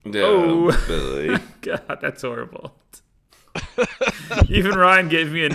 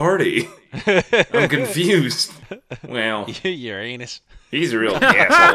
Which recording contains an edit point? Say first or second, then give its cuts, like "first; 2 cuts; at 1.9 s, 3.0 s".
second; 1 cut; at 2.4 s